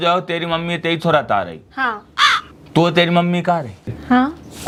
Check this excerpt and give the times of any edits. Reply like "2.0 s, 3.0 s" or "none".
none